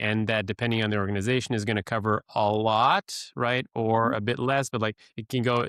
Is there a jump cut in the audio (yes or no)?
no